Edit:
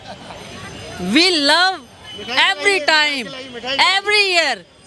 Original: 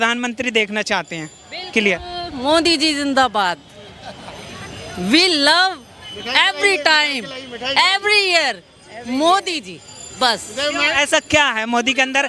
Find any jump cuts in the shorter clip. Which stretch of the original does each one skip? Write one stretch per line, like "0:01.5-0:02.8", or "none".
none